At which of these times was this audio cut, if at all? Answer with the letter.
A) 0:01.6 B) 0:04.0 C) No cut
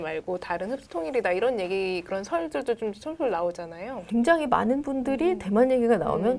B